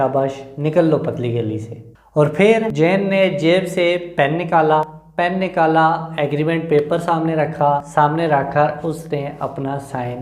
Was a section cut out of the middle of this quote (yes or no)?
yes